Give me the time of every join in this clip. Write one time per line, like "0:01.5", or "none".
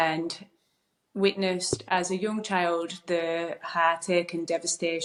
none